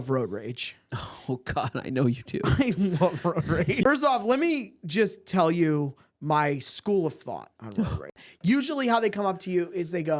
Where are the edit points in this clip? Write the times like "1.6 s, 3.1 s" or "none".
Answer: 3.8 s, 8.1 s